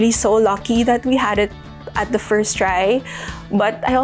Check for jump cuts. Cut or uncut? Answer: uncut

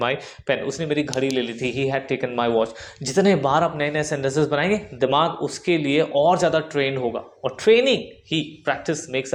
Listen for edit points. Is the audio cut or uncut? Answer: uncut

